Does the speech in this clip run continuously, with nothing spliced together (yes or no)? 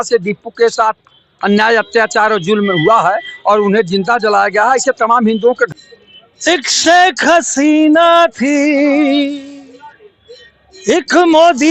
no